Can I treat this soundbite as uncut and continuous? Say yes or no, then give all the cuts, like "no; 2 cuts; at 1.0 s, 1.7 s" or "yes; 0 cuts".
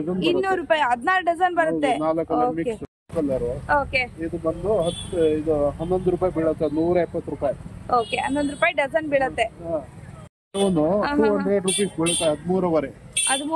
no; 1 cut; at 3.0 s